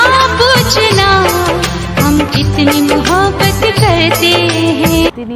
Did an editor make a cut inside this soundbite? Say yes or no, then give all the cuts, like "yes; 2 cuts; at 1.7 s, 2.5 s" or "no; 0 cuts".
no; 0 cuts